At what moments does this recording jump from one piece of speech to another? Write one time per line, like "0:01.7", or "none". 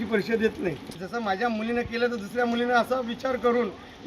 0:00.9

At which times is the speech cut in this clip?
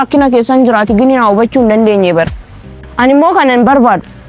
0:02.8

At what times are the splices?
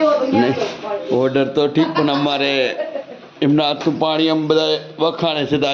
none

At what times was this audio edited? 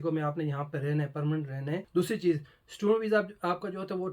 0:01.9

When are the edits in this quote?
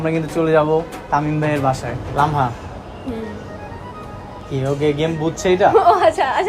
0:01.9
0:04.1

